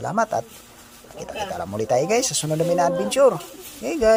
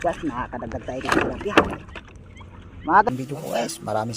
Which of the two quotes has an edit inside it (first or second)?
second